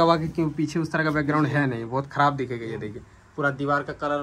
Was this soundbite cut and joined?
no; 0 cuts

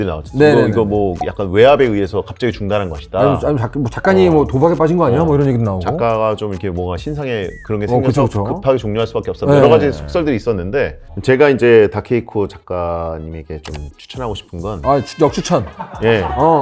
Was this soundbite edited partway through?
yes; 1 cut; at 11.0 s

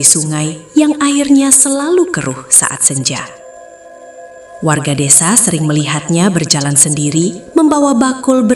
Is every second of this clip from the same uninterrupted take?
yes; 0 cuts

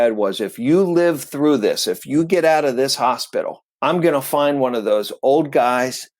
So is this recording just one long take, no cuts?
no; 1 cut; at 3.6 s

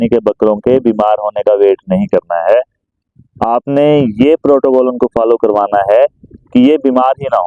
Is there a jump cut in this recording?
no; 0 cuts

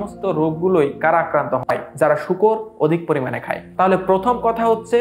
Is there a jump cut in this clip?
no; 0 cuts

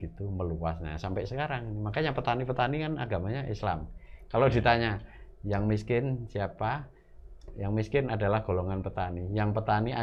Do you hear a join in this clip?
no; 0 cuts

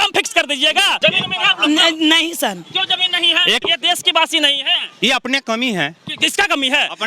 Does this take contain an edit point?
yes; 2 cuts; at 1.0 s, 3.6 s

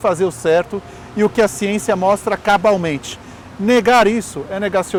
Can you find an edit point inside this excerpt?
no; 0 cuts

